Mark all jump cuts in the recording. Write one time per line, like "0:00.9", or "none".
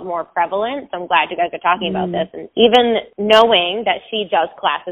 none